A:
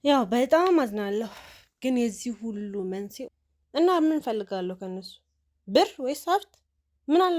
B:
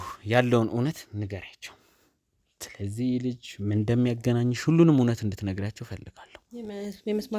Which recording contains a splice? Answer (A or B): A